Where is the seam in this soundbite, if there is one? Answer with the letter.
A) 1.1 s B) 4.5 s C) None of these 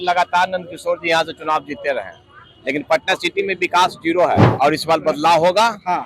B